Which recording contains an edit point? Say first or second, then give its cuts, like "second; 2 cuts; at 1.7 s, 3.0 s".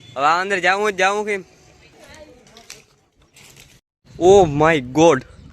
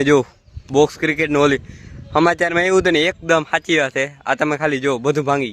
first; 2 cuts; at 1.9 s, 4.0 s